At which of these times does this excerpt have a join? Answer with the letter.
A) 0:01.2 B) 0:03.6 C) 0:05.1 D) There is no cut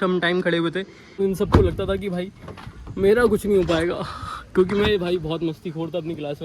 A